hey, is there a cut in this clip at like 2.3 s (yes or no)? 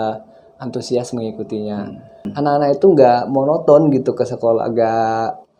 yes